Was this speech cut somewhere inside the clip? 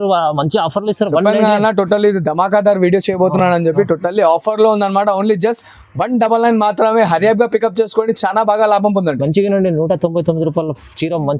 no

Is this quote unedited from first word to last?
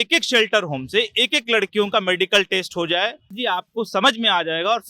no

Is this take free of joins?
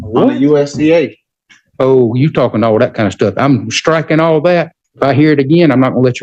no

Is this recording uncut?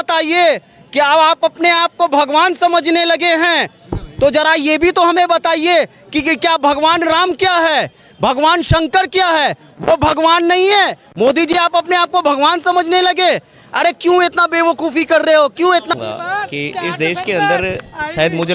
no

